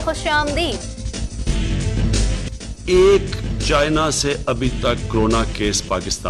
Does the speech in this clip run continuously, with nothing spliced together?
yes; 0 cuts

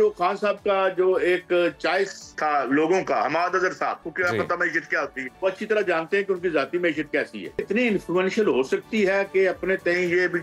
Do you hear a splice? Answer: yes; 4 cuts; at 2.2 s, 4.0 s, 5.2 s, 7.6 s

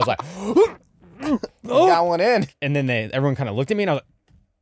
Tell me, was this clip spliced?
yes; 1 cut; at 2.6 s

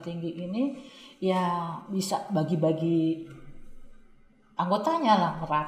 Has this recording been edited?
no; 0 cuts

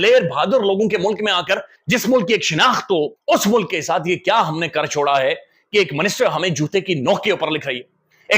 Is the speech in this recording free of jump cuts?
no; 2 cuts; at 1.7 s, 3.2 s

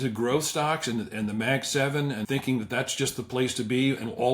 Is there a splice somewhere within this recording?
yes; 1 cut; at 2.2 s

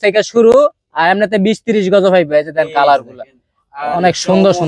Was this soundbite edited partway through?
no; 0 cuts

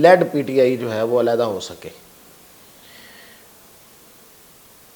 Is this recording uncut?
yes; 0 cuts

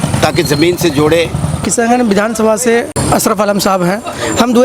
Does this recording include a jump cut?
yes; 2 cuts; at 1.7 s, 2.9 s

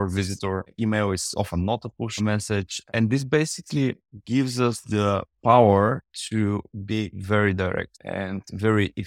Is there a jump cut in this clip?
yes; 2 cuts; at 2.1 s, 8.0 s

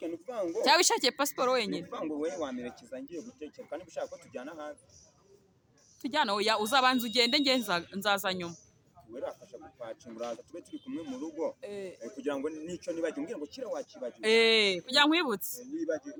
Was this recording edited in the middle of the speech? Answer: no; 0 cuts

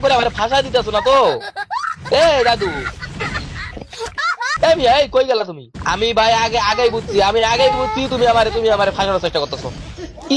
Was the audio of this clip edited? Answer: yes; 1 cut; at 5.7 s

